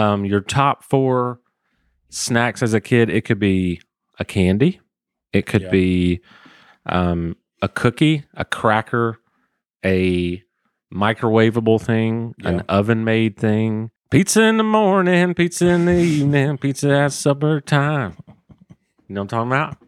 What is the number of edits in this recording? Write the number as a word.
one